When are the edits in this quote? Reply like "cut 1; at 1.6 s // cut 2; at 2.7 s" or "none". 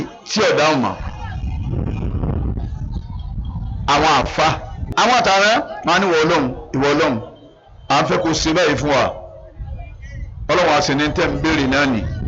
cut 1; at 4.8 s